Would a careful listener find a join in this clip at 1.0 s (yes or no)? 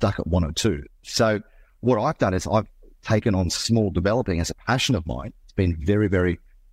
yes